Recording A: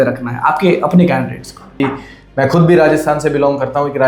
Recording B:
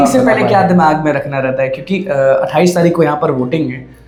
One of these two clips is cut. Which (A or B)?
A